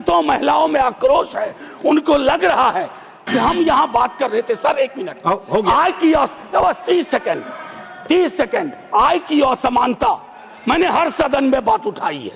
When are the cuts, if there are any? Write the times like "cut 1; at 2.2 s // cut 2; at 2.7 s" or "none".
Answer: none